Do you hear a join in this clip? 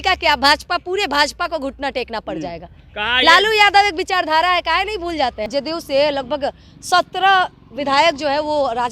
yes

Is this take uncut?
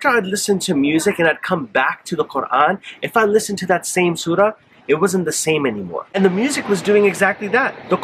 no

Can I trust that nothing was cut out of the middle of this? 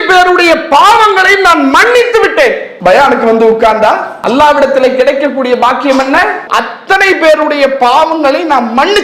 no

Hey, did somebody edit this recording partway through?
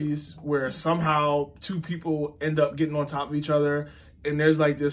no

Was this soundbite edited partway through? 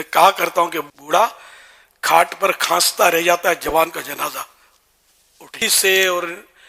yes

